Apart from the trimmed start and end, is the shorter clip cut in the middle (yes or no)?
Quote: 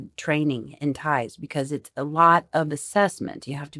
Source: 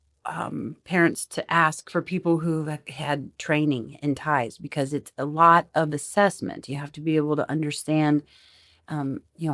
no